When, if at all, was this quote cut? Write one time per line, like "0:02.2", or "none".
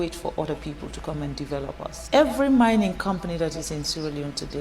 0:02.0